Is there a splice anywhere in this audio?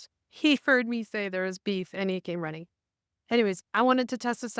no; 0 cuts

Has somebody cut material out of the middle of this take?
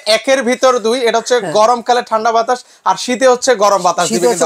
no; 0 cuts

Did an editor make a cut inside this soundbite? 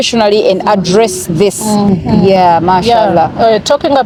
no; 0 cuts

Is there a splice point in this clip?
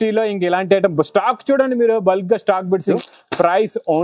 yes; 1 cut; at 2.9 s

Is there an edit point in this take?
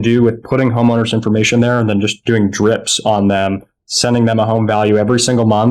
no; 0 cuts

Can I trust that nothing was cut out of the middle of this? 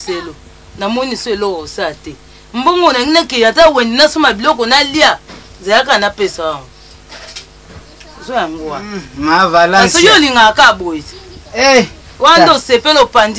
yes; 0 cuts

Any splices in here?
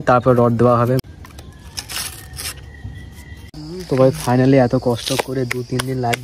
yes; 2 cuts; at 1.0 s, 3.5 s

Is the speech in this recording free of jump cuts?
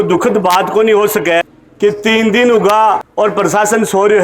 no; 2 cuts; at 1.4 s, 3.1 s

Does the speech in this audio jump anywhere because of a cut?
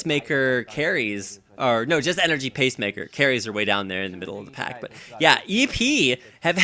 no; 0 cuts

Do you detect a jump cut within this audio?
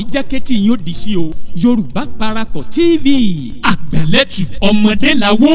no; 0 cuts

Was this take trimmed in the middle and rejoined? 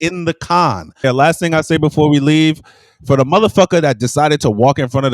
yes; 1 cut; at 1.0 s

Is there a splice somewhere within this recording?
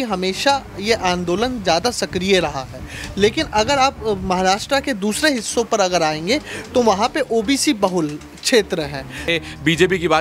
yes; 1 cut; at 9.3 s

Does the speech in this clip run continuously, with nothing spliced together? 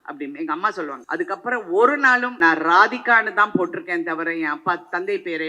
no; 2 cuts; at 1.0 s, 2.3 s

